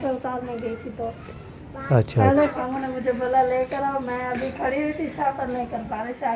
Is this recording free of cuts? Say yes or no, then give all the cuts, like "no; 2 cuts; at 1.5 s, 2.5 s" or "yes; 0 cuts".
no; 1 cut; at 2.5 s